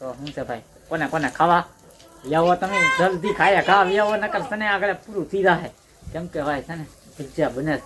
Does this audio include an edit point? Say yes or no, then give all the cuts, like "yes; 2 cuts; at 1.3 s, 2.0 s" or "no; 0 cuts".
no; 0 cuts